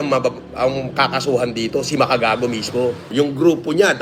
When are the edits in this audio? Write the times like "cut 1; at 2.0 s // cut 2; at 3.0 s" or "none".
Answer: cut 1; at 3.1 s